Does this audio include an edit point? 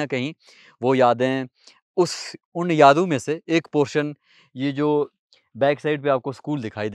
no; 0 cuts

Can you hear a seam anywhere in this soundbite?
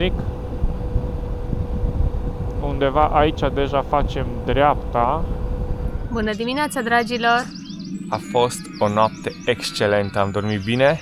yes; 1 cut; at 6.0 s

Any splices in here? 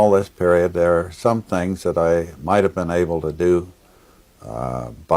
no; 0 cuts

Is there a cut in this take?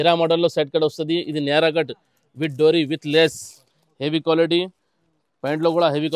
no; 0 cuts

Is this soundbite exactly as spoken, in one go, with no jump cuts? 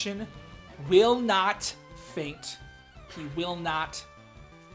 yes; 0 cuts

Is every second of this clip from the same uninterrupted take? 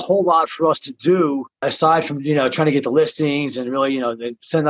no; 1 cut; at 1.7 s

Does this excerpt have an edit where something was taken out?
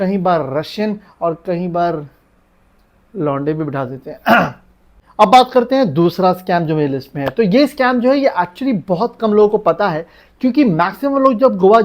no; 0 cuts

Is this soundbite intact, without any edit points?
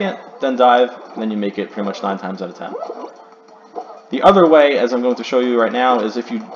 yes; 0 cuts

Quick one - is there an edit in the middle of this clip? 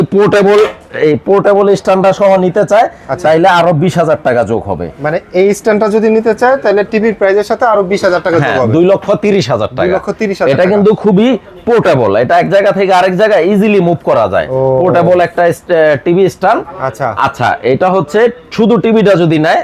no; 0 cuts

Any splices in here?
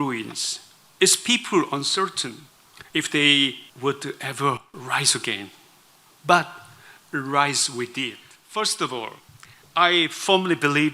yes; 1 cut; at 8.3 s

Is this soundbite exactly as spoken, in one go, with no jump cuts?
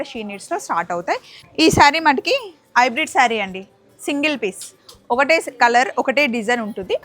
no; 1 cut; at 1.4 s

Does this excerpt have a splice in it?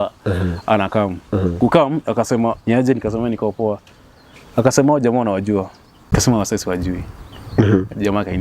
yes; 2 cuts; at 2.6 s, 6.1 s

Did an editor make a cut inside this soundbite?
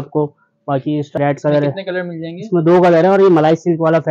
yes; 1 cut; at 1.2 s

